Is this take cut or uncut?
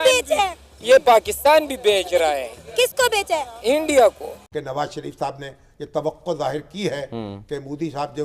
cut